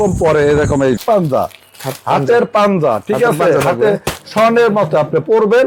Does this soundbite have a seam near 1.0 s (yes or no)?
yes